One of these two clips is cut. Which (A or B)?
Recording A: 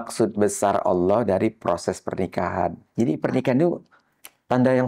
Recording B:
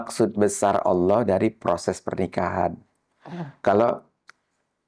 A